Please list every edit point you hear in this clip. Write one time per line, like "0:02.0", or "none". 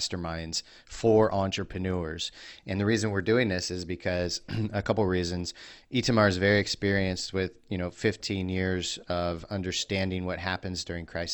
none